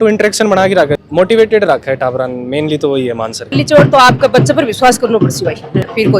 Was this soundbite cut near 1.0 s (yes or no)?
yes